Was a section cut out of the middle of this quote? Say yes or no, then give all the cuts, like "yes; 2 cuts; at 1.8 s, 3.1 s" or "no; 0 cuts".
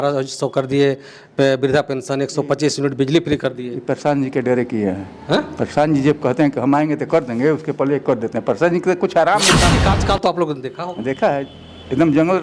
yes; 1 cut; at 9.8 s